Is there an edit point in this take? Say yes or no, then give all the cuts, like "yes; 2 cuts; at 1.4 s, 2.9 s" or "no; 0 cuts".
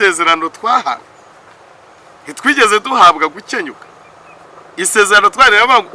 no; 0 cuts